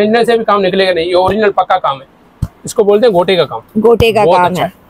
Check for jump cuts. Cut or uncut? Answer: uncut